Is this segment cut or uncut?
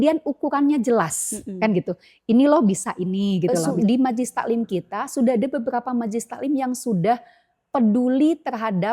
cut